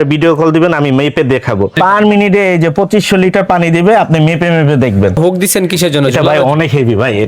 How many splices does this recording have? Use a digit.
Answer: 2